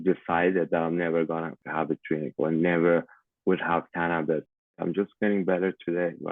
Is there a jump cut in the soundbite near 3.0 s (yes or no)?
no